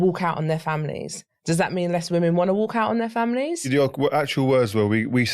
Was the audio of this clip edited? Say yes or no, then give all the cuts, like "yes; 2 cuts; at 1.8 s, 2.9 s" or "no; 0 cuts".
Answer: yes; 1 cut; at 3.7 s